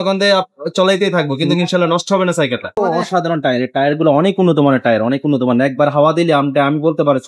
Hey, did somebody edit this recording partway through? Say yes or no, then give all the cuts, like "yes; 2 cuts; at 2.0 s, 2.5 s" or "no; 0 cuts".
yes; 1 cut; at 2.7 s